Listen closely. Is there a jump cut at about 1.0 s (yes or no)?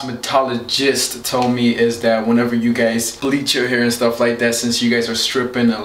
no